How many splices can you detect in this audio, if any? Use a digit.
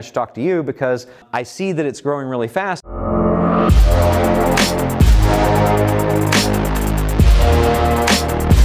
2